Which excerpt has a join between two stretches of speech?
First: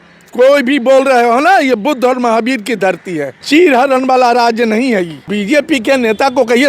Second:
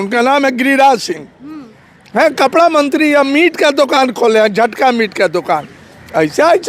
first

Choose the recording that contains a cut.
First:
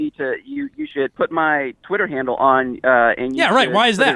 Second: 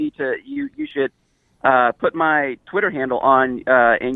first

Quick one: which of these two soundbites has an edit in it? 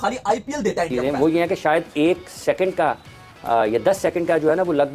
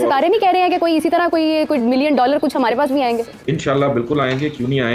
first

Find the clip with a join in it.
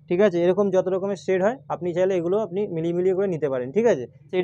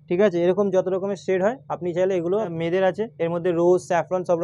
second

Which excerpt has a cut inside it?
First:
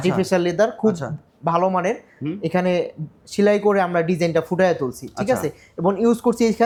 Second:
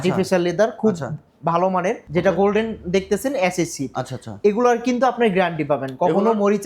second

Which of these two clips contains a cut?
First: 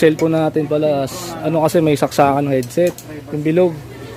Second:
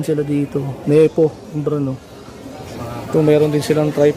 second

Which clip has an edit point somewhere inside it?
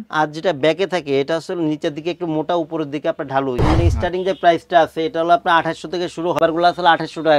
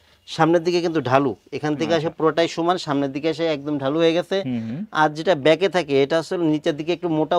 first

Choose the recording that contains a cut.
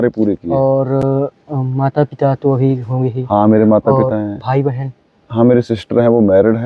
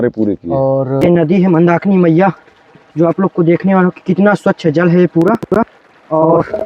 second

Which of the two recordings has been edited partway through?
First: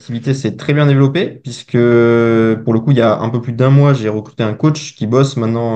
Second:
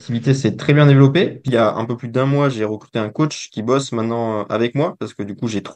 second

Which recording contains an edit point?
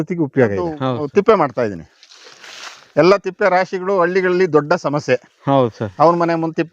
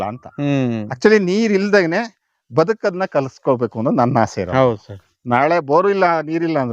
first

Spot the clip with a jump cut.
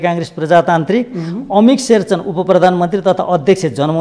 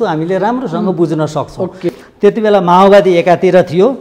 second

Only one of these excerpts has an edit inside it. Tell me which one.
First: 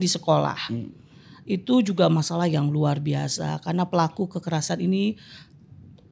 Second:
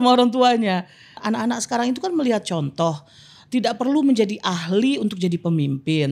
second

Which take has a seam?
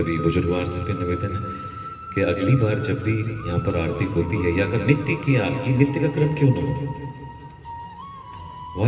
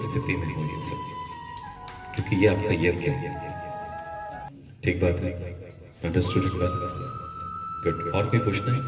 second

